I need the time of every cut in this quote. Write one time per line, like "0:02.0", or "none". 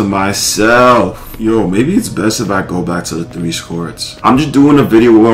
0:01.3
0:04.1